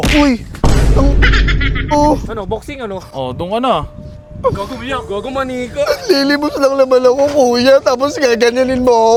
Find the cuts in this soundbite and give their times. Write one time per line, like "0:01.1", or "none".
none